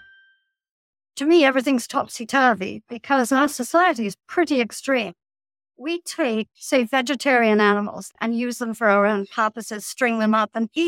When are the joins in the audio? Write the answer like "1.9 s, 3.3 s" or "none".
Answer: 1.0 s, 6.6 s, 8.1 s